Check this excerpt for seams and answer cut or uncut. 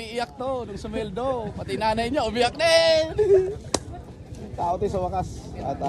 uncut